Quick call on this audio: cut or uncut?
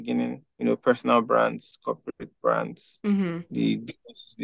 uncut